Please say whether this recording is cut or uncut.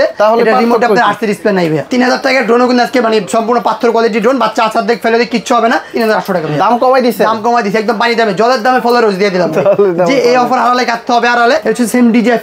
cut